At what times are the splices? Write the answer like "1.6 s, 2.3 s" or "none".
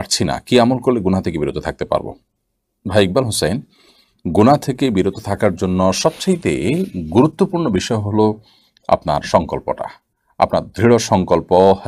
none